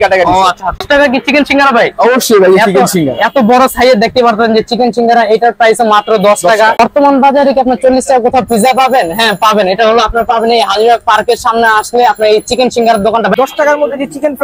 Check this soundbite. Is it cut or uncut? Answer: cut